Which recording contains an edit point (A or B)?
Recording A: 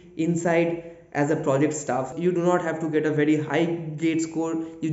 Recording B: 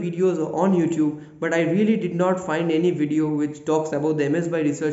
A